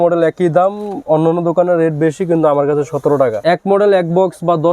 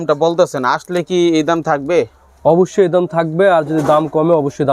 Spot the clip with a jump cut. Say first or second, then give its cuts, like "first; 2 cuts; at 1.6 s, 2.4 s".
first; 1 cut; at 3.4 s